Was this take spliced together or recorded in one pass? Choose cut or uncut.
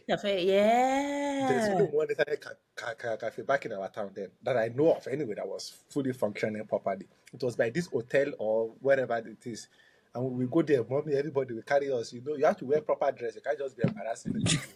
uncut